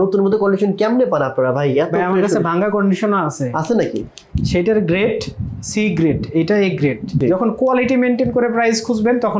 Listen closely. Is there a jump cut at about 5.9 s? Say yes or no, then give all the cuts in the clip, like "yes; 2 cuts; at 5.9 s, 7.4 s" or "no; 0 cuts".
no; 1 cut; at 7.2 s